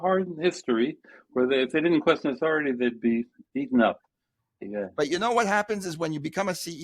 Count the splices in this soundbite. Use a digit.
1